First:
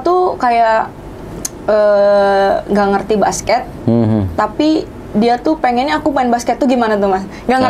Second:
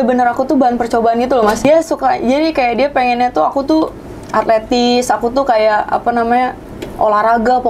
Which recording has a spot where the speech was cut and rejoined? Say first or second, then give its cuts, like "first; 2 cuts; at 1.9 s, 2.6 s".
second; 1 cut; at 1.6 s